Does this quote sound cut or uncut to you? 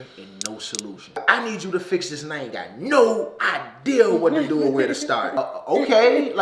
cut